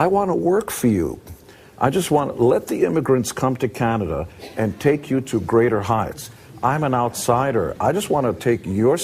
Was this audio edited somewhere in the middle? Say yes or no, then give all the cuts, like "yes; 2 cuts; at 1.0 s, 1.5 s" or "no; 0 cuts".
yes; 1 cut; at 5.8 s